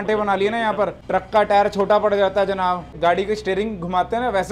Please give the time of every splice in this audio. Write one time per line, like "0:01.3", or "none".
0:01.0
0:02.9